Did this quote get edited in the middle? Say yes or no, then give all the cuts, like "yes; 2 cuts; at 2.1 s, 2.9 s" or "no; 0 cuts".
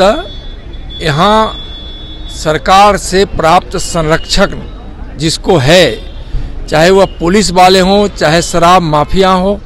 no; 0 cuts